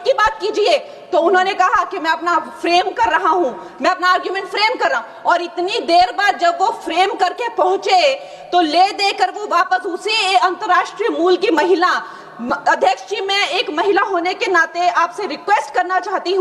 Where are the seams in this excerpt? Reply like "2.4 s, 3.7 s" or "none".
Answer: none